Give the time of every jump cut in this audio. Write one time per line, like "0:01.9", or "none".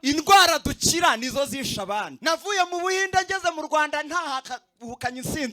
0:02.1